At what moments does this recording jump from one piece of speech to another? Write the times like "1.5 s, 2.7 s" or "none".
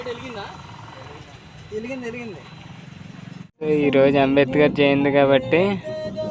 3.5 s